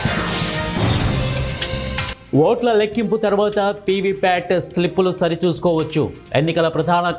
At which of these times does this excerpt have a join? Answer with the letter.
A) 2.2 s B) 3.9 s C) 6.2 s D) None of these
A